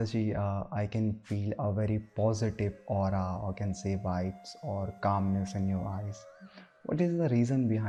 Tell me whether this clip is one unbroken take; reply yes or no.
yes